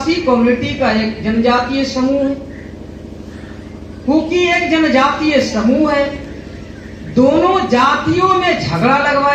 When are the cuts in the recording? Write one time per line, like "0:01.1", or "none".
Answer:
none